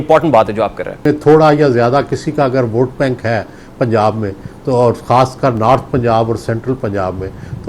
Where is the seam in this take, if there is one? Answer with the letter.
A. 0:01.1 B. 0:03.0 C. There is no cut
A